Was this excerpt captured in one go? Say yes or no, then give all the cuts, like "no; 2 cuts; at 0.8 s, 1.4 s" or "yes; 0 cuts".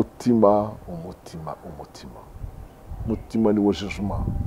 yes; 0 cuts